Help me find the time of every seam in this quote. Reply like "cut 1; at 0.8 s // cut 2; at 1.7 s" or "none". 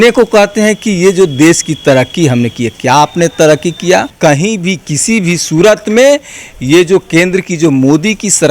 cut 1; at 4.1 s